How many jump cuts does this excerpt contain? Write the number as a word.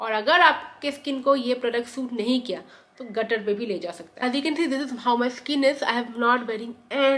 one